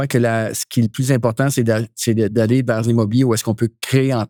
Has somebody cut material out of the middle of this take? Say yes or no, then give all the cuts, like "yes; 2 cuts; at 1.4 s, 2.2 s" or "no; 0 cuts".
no; 0 cuts